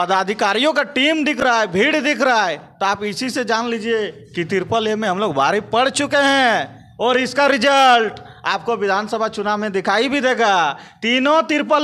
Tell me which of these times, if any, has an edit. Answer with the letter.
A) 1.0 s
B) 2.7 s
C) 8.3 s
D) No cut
D